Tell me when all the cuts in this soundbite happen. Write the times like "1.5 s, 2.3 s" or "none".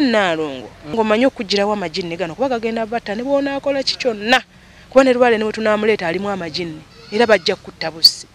0.9 s